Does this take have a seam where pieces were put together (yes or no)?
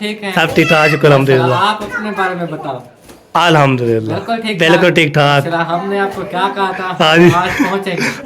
no